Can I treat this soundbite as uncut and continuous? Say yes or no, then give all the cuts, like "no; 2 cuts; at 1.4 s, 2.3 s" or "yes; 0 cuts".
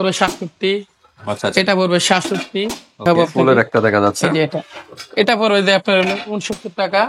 no; 1 cut; at 3.0 s